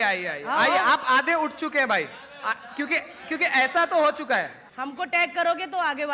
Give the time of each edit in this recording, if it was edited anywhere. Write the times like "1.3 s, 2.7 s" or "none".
4.6 s